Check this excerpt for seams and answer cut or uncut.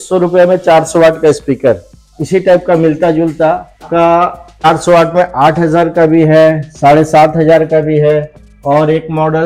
cut